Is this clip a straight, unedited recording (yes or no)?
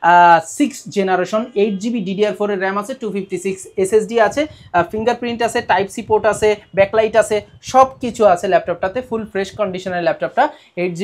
yes